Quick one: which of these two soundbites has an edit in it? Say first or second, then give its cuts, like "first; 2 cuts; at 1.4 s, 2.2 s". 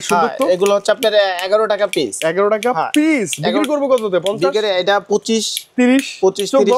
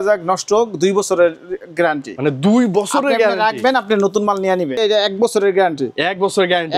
second; 1 cut; at 4.8 s